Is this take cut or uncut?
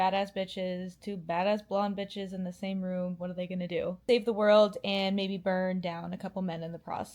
uncut